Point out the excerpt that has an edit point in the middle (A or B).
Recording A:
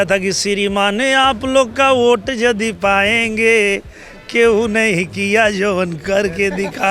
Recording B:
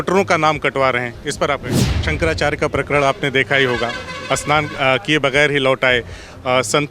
B